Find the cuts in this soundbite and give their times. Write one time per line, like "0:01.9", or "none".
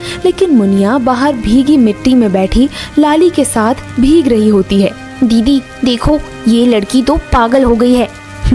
none